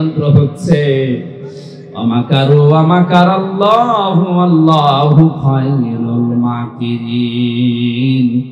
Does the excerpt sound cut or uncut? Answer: uncut